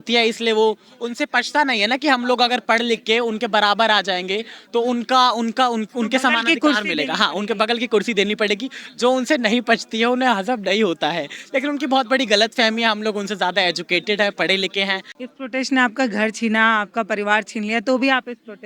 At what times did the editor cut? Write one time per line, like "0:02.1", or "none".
0:15.1